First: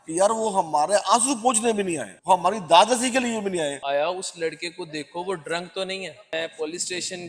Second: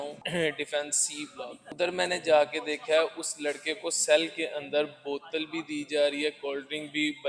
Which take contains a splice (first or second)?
first